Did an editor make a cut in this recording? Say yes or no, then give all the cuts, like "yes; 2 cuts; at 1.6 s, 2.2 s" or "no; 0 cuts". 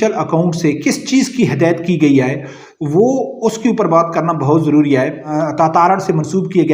yes; 1 cut; at 5.3 s